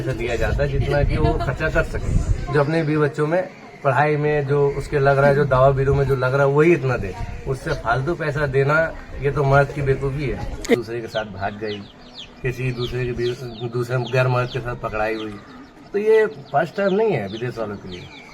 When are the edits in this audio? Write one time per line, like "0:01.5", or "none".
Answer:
0:10.8